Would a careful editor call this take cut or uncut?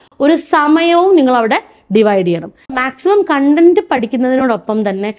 cut